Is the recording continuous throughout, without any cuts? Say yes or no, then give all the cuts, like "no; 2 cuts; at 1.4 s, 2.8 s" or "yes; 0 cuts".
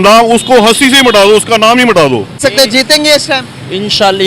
no; 1 cut; at 2.4 s